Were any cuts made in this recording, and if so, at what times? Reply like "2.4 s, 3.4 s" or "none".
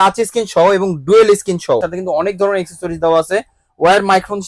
1.9 s